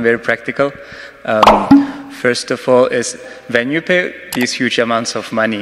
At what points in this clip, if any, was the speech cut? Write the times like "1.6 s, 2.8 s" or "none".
1.4 s, 2.0 s